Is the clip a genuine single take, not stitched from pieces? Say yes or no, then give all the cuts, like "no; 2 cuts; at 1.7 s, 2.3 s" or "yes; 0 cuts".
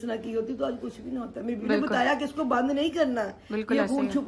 yes; 0 cuts